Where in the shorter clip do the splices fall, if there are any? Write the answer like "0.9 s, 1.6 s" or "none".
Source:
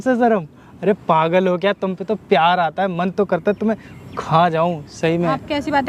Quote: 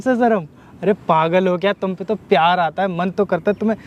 none

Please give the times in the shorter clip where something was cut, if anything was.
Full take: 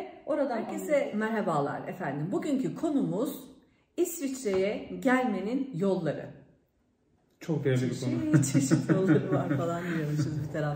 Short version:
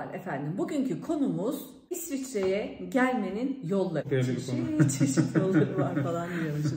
2.0 s, 4.1 s

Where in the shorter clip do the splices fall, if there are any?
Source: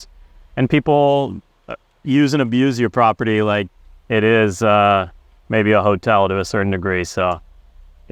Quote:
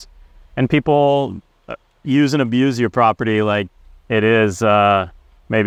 none

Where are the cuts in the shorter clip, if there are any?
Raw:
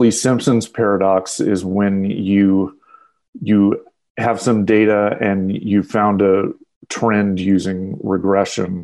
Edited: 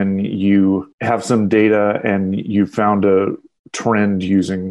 0.9 s

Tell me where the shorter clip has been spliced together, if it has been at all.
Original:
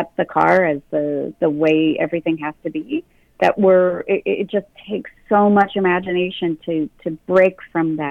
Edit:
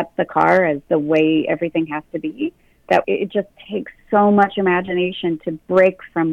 0.8 s, 3.0 s, 5.4 s

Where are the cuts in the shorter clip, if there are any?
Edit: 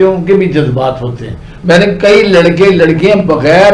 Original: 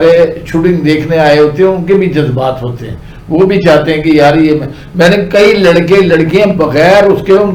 1.5 s

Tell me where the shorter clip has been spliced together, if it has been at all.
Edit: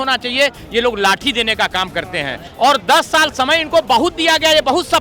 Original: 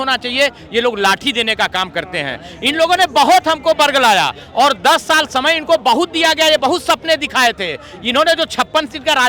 2.4 s

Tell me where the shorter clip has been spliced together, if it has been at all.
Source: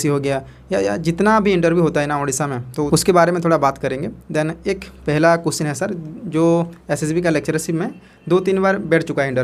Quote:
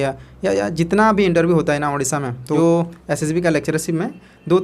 2.4 s

